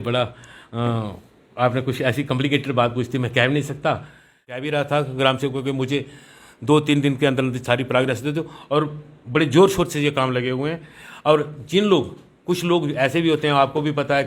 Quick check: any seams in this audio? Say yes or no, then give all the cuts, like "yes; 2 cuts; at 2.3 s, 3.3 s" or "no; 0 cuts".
yes; 1 cut; at 4.6 s